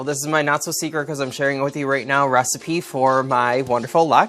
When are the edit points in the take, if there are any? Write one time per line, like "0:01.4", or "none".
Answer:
none